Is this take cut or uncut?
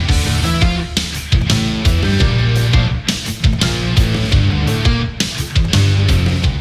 uncut